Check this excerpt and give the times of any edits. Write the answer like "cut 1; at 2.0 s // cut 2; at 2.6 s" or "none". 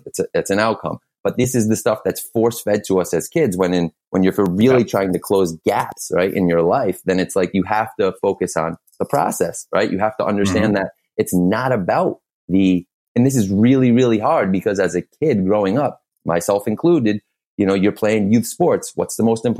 none